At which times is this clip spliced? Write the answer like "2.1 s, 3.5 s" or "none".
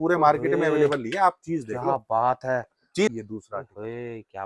3.1 s